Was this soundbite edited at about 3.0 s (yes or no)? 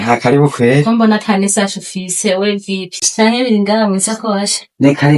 yes